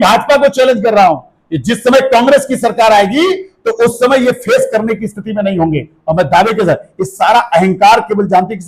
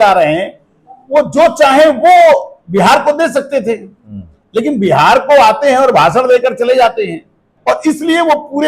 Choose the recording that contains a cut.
second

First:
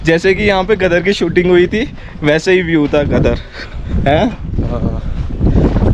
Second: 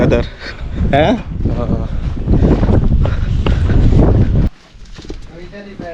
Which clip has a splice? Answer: second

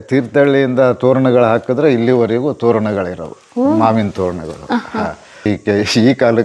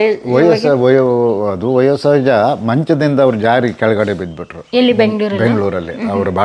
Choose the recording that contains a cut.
first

